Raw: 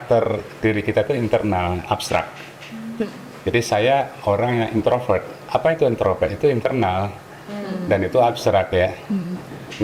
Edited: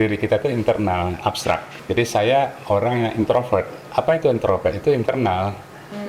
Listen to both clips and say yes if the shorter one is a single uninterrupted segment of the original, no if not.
no